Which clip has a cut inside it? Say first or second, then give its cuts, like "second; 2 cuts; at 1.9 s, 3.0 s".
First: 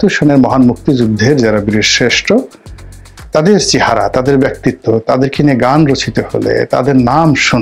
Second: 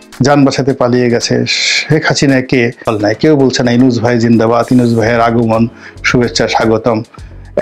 second; 1 cut; at 2.8 s